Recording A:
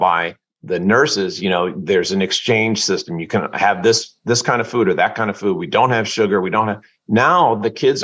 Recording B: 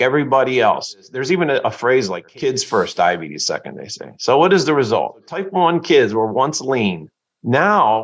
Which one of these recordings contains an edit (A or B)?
B